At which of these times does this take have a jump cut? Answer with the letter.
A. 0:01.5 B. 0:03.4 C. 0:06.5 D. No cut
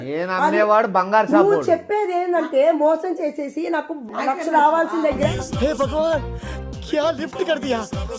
D